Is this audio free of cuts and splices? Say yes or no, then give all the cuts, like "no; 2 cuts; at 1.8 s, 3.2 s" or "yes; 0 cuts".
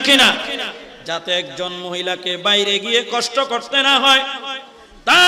yes; 0 cuts